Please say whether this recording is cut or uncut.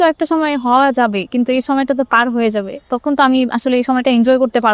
uncut